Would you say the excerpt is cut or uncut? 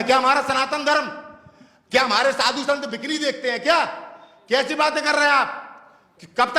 uncut